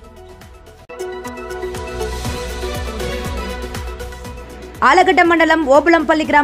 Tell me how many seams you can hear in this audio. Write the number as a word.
two